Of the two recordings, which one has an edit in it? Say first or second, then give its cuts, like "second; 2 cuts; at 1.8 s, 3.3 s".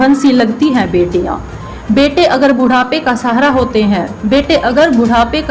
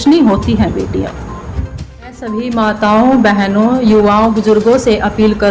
second; 1 cut; at 2.4 s